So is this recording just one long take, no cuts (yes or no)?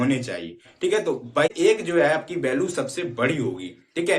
no